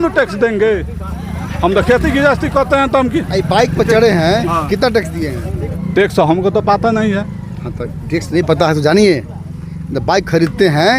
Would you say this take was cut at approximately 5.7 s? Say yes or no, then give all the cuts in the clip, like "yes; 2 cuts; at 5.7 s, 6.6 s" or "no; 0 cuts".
yes; 1 cut; at 5.7 s